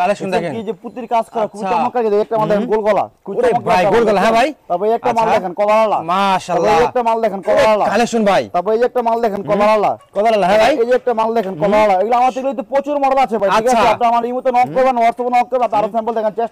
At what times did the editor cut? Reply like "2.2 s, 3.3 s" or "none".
none